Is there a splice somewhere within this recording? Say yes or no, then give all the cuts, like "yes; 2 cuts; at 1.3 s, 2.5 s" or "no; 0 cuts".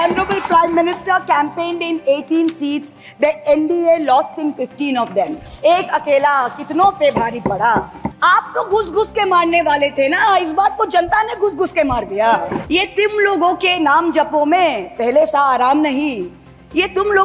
yes; 2 cuts; at 8.0 s, 12.6 s